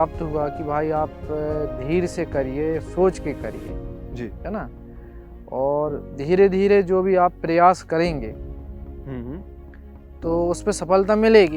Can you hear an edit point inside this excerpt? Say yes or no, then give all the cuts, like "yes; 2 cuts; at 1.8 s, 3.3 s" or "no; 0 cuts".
no; 0 cuts